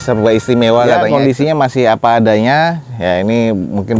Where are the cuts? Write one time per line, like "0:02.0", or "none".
0:01.0